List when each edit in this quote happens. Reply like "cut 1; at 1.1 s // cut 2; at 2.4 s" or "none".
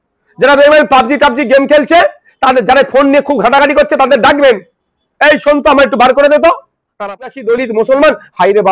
cut 1; at 7.1 s

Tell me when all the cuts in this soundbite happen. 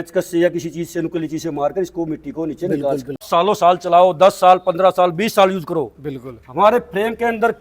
cut 1; at 3.2 s

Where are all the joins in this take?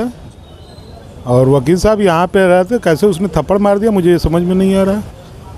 none

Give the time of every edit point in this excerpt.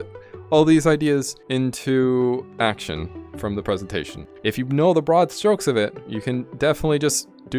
cut 1; at 1.4 s // cut 2; at 2.5 s // cut 3; at 4.3 s

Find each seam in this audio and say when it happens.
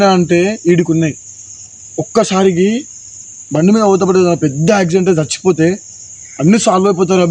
none

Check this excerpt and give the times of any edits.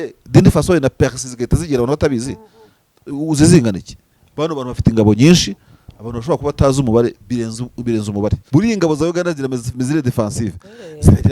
cut 1; at 8.4 s

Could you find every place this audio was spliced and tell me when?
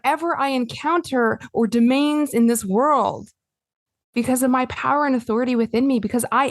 cut 1; at 4.0 s

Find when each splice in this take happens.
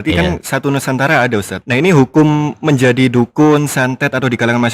cut 1; at 1.6 s

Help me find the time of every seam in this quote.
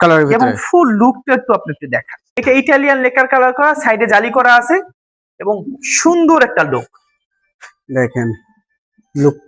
cut 1; at 2.4 s

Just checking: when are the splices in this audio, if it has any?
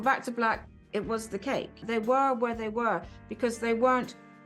cut 1; at 1.8 s

